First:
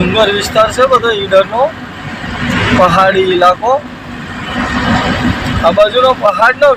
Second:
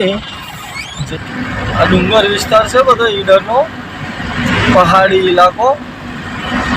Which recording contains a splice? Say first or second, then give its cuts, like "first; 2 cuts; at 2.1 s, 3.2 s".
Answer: second; 1 cut; at 1.0 s